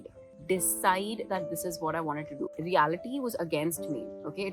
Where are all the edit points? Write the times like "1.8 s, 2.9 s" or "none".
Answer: 2.5 s